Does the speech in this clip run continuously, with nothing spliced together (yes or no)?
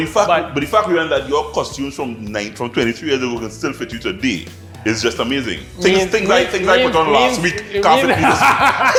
yes